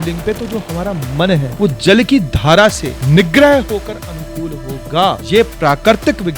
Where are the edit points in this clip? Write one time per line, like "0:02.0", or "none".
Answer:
0:01.5
0:02.9
0:05.2